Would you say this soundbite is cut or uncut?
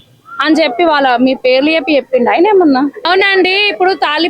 cut